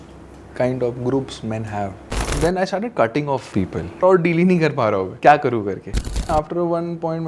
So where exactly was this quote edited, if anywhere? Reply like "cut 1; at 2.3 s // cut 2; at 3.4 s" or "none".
cut 1; at 2.3 s // cut 2; at 4.0 s // cut 3; at 5.1 s // cut 4; at 6.3 s